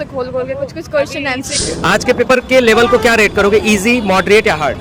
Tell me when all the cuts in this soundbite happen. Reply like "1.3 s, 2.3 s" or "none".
1.6 s